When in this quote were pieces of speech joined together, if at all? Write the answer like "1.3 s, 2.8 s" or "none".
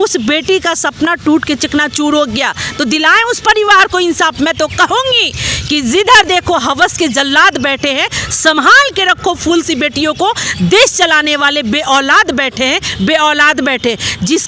none